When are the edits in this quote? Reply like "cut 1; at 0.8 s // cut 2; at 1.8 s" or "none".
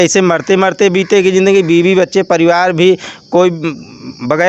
none

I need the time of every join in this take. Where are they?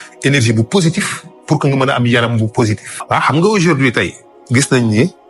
cut 1; at 2.9 s

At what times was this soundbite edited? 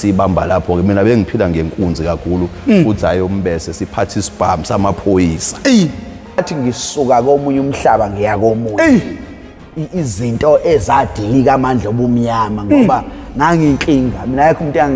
cut 1; at 6.4 s

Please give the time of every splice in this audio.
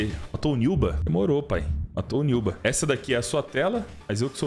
none

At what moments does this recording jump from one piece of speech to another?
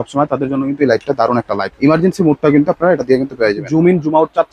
cut 1; at 1.6 s // cut 2; at 3.6 s

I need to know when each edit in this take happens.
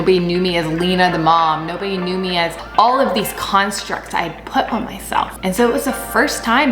cut 1; at 2.6 s // cut 2; at 5.3 s

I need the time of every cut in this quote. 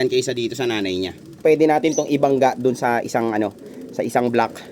cut 1; at 1.4 s

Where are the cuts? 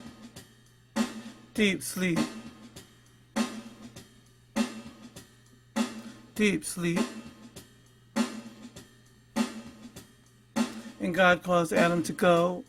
cut 1; at 1.2 s

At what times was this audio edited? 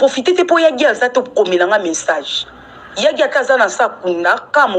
cut 1; at 0.9 s

